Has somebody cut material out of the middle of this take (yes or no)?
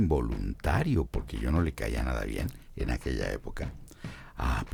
no